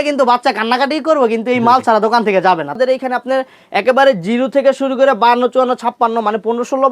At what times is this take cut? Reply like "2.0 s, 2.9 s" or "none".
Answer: 2.8 s